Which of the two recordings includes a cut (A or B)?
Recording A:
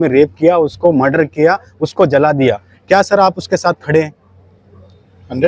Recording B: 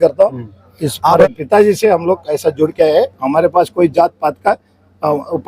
B